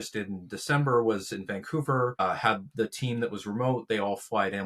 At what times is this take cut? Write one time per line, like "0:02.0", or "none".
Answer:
0:02.2